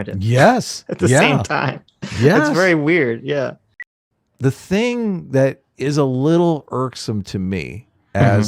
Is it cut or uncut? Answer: cut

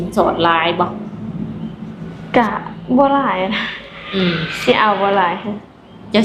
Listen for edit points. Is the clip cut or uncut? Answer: uncut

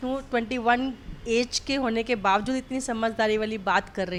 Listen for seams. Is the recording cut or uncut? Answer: uncut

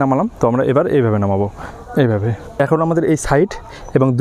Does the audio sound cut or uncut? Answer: cut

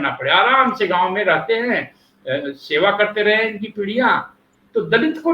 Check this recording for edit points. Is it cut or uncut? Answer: uncut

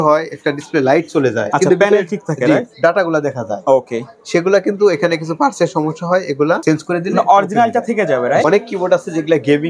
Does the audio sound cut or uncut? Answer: cut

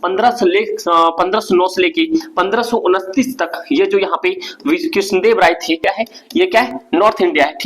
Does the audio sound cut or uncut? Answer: cut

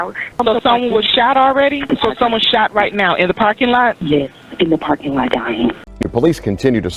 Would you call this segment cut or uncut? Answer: cut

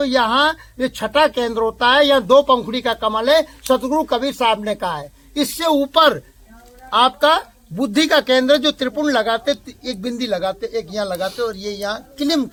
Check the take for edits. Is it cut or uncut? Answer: uncut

